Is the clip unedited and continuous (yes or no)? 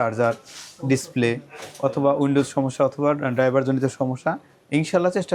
yes